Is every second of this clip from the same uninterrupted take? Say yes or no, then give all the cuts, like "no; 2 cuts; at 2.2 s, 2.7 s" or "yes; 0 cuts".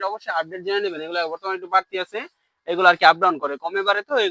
yes; 0 cuts